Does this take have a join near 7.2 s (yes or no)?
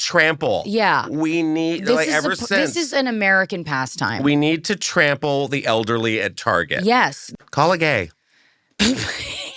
yes